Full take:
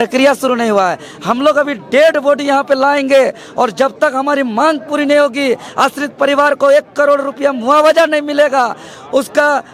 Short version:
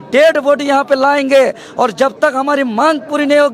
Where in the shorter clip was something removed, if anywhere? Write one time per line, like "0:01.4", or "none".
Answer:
none